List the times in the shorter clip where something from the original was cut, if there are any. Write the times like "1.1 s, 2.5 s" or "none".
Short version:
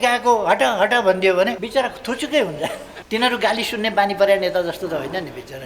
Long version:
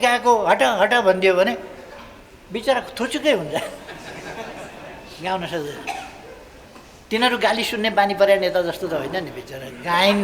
1.6 s, 2.9 s